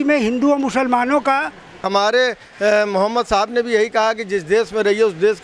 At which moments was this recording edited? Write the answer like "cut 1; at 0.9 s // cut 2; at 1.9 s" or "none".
cut 1; at 1.9 s